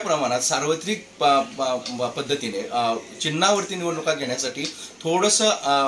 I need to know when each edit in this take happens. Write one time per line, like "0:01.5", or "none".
none